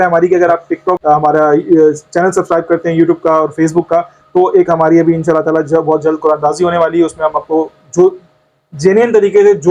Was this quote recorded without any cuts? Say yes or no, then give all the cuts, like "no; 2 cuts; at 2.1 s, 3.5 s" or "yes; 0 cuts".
no; 1 cut; at 1.0 s